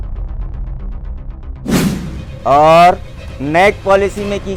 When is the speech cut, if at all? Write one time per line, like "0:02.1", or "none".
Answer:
none